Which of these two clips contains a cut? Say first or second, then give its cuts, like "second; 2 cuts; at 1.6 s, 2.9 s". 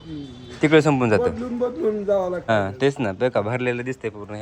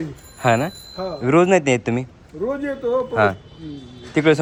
first; 1 cut; at 2.5 s